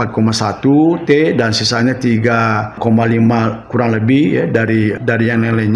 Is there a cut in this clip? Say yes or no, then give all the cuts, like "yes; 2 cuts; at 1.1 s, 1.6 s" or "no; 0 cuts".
yes; 2 cuts; at 2.8 s, 5.0 s